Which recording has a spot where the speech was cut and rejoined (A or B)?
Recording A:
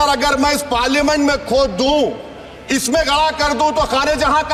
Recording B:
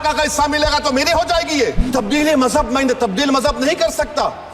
B